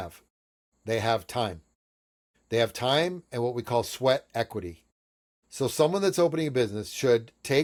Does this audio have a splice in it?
no; 0 cuts

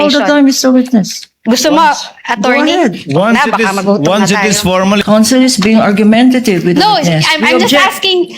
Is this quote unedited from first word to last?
no; 1 cut; at 5.0 s

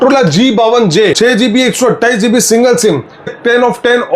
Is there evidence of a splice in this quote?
yes; 2 cuts; at 1.2 s, 3.3 s

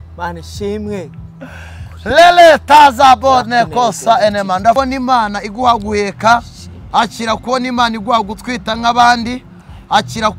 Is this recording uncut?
no; 1 cut; at 4.8 s

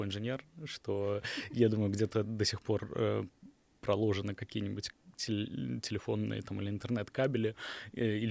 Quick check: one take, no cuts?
yes; 0 cuts

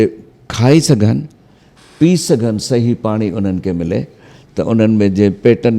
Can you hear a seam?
no; 0 cuts

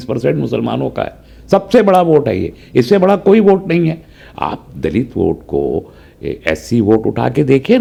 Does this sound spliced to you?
no; 0 cuts

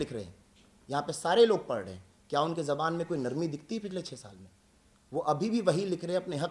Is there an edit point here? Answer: no; 0 cuts

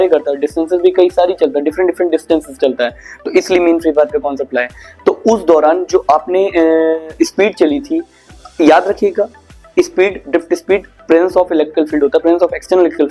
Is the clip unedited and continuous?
yes; 0 cuts

